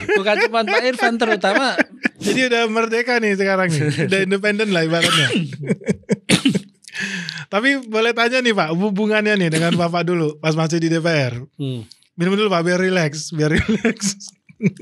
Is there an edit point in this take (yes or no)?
yes